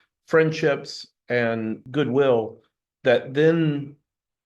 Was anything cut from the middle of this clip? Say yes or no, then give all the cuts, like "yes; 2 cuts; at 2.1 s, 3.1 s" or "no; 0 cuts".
yes; 1 cut; at 1.8 s